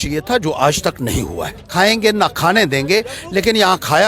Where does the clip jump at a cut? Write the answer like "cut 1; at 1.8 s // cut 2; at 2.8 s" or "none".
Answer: cut 1; at 1.7 s